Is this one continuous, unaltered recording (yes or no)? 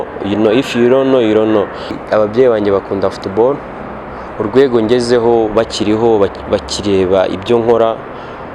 no